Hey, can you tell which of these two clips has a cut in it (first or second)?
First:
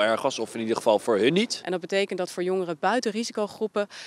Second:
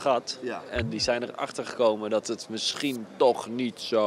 first